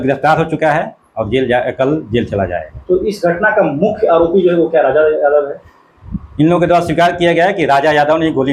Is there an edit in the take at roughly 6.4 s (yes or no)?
no